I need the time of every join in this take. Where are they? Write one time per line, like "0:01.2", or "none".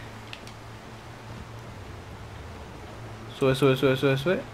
none